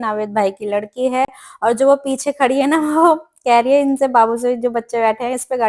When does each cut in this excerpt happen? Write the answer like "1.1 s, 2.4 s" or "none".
none